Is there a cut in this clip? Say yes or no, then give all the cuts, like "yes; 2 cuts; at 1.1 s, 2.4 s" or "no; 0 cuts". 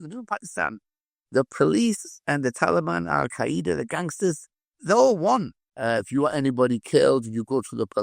yes; 1 cut; at 5.6 s